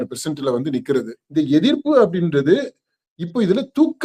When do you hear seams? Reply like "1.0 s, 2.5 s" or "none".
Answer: 1.2 s